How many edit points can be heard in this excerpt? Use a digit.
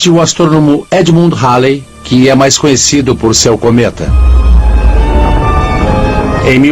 1